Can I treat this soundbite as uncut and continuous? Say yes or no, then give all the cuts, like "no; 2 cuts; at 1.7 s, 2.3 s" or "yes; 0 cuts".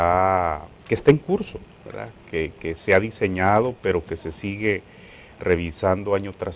no; 1 cut; at 4.0 s